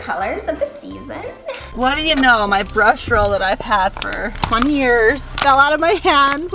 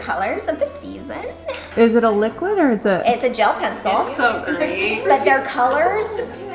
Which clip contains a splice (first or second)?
first